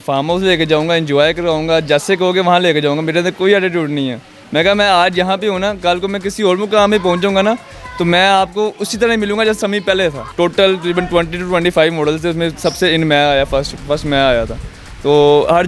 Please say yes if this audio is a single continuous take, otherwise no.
no